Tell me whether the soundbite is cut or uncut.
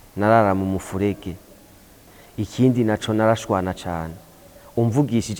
cut